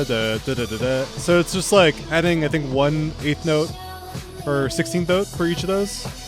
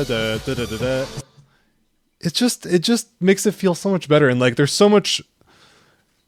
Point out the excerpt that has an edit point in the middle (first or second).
first